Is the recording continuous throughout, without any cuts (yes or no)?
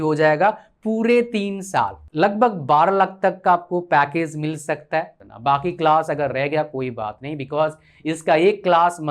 no